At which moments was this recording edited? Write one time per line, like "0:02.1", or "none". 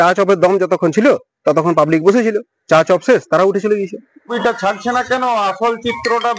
0:04.3

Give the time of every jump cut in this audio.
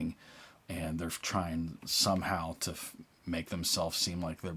none

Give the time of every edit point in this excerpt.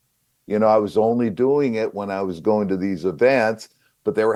none

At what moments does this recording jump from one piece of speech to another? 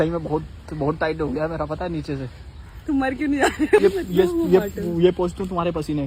0:03.8

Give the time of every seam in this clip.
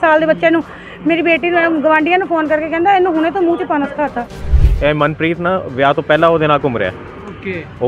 0:04.4

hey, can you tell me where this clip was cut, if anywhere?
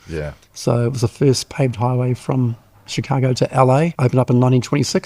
0:03.9

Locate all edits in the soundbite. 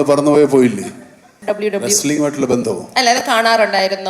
0:01.3

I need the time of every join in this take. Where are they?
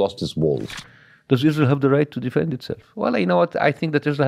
0:01.0

